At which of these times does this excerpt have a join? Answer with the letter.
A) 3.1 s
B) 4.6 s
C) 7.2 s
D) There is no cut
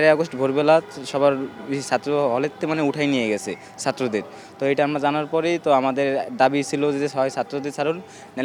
D